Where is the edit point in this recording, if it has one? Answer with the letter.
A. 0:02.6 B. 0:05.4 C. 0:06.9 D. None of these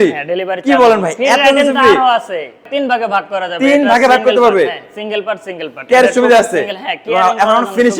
A